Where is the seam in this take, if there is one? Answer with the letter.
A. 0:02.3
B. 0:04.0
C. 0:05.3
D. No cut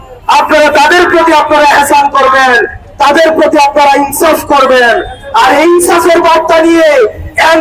D